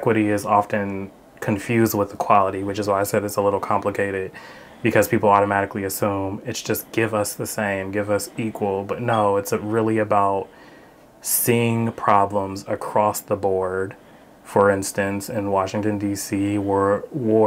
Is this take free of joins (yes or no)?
yes